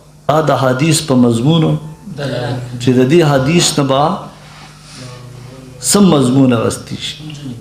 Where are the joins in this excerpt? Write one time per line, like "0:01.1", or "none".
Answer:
none